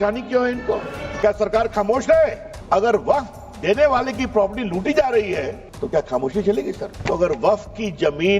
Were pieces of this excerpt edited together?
yes; 4 cuts; at 1.1 s, 2.5 s, 5.6 s, 6.9 s

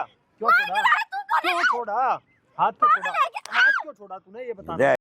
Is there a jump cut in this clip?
no; 0 cuts

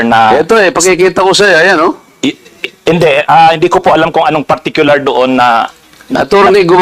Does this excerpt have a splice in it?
no; 0 cuts

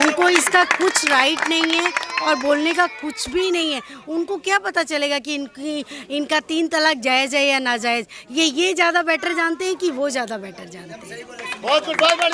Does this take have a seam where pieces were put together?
no; 0 cuts

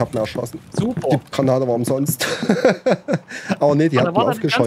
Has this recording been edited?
no; 0 cuts

